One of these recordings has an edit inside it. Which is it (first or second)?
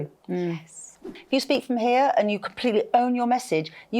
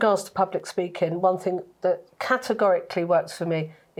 first